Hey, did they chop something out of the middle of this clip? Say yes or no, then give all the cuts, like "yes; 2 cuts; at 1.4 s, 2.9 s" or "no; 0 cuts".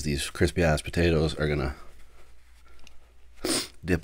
no; 0 cuts